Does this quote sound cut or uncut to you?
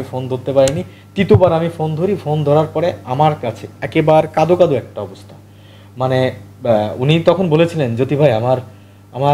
uncut